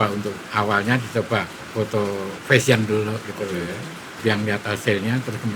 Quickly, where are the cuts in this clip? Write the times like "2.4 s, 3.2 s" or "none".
1.6 s, 4.2 s